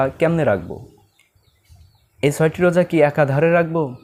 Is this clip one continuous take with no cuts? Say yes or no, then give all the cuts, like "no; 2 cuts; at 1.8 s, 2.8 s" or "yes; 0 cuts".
yes; 0 cuts